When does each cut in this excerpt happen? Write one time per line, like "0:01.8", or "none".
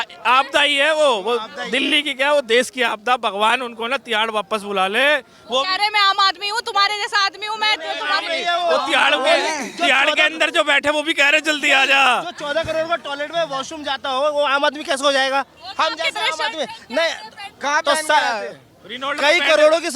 none

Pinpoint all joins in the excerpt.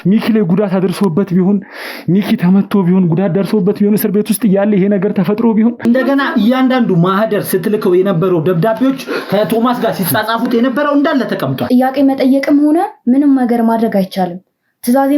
0:05.8
0:11.6

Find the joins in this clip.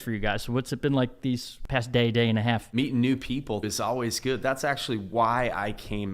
0:01.6
0:02.7
0:03.6

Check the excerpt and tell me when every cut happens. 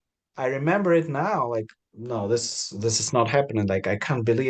0:01.8

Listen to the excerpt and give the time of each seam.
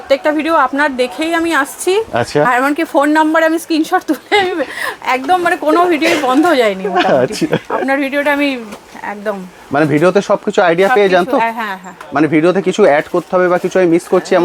none

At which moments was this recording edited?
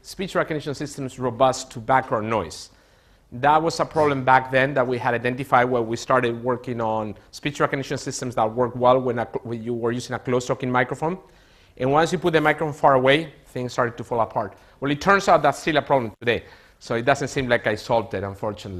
none

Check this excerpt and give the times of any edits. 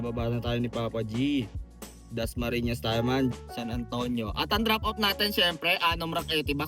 0:03.3

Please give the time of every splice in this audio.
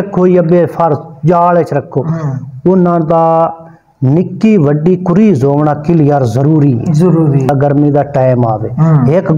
0:07.5

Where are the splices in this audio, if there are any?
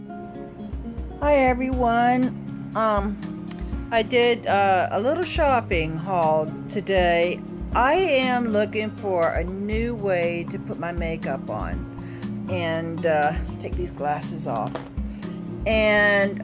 0:01.2

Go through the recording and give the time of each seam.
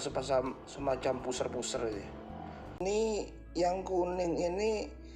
0:02.8

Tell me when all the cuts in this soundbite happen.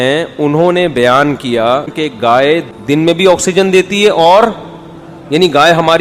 0:02.4

